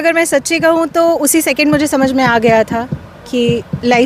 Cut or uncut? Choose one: uncut